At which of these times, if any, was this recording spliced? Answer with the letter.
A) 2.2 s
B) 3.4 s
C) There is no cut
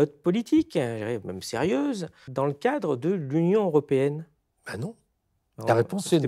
A